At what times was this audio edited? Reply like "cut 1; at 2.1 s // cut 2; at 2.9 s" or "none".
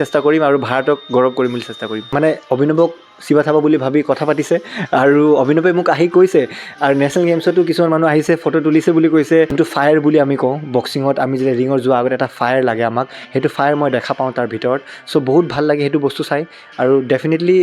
cut 1; at 2.1 s // cut 2; at 9.5 s